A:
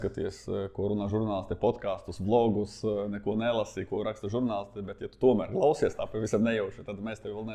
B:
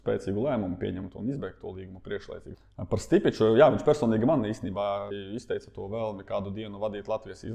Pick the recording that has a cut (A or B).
B